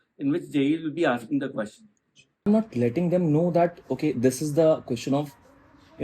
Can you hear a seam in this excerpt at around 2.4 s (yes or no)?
yes